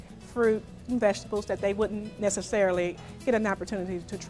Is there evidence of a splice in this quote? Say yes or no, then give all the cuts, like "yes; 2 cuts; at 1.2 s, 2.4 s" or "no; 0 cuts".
yes; 1 cut; at 3.0 s